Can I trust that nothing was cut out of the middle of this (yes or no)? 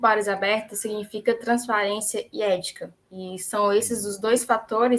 yes